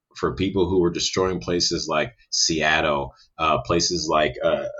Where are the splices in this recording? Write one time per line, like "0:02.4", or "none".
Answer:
none